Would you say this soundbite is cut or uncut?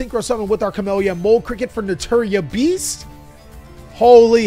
uncut